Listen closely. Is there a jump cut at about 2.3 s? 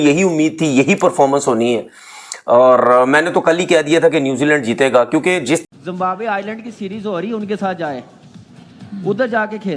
no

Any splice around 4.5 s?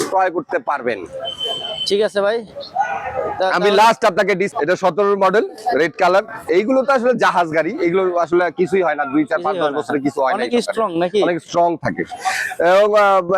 yes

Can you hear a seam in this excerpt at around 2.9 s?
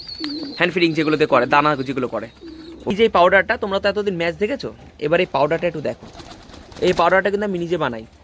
yes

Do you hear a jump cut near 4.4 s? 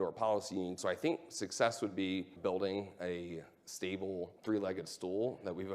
yes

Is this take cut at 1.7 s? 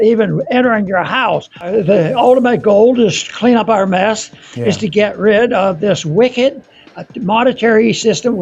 yes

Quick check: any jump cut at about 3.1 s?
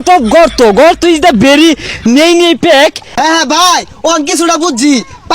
yes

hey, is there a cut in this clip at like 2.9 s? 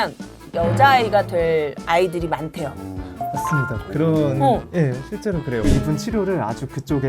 no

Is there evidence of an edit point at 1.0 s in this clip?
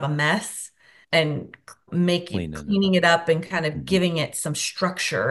yes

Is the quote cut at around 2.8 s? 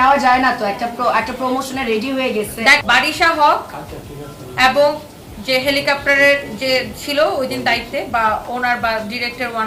yes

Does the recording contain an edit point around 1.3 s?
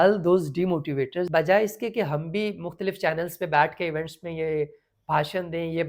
yes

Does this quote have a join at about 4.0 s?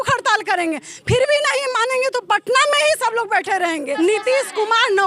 yes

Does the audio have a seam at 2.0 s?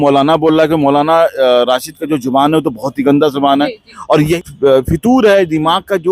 no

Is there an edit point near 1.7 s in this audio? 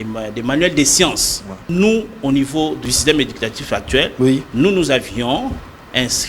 yes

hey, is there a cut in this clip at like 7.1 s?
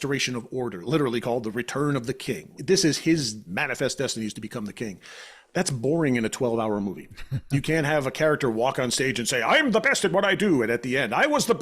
no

